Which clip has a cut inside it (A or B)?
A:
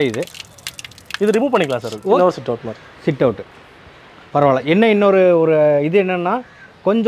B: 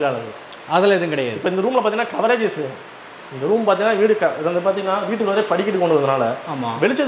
A